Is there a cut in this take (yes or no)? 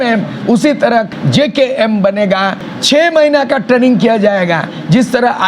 yes